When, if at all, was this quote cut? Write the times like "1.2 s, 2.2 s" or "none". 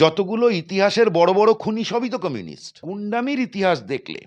2.9 s